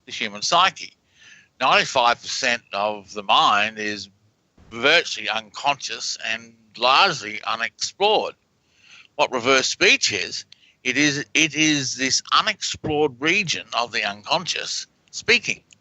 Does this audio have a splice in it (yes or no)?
yes